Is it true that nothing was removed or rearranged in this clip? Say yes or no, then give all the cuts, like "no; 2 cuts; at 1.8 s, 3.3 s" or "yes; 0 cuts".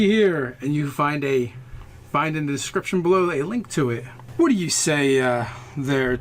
no; 1 cut; at 4.8 s